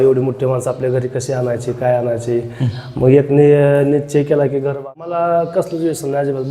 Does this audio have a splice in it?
yes; 1 cut; at 4.8 s

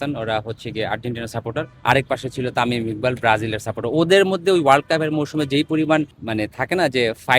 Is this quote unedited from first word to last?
no; 2 cuts; at 1.7 s, 6.2 s

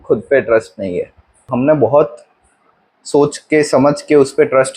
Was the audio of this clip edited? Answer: yes; 1 cut; at 1.5 s

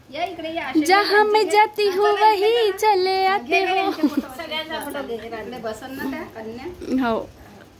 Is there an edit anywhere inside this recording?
no; 0 cuts

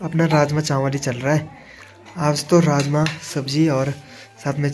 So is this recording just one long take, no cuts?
yes; 0 cuts

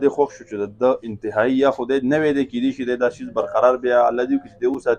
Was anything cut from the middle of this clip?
no; 0 cuts

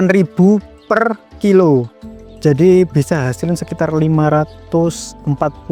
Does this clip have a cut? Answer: no; 0 cuts

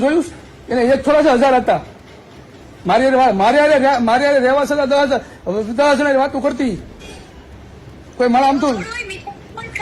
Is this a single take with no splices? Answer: yes; 0 cuts

